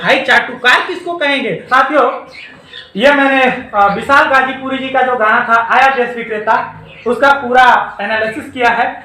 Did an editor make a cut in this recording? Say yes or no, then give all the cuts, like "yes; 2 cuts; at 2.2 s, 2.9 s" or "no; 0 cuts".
yes; 1 cut; at 1.6 s